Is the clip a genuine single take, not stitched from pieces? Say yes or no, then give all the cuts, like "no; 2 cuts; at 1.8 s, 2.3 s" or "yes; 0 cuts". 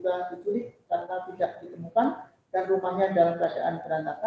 yes; 0 cuts